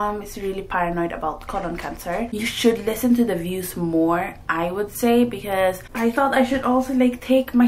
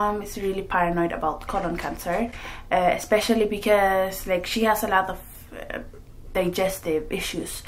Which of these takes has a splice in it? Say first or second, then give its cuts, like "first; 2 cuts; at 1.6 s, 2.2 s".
first; 2 cuts; at 2.3 s, 5.9 s